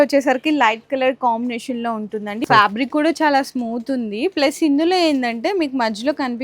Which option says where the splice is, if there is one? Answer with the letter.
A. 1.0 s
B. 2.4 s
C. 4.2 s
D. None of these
B